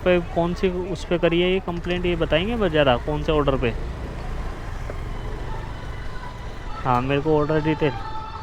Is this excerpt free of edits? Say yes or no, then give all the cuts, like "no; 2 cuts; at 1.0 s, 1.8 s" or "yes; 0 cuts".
yes; 0 cuts